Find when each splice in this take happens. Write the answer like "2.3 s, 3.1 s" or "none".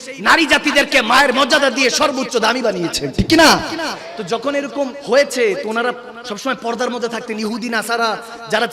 5.0 s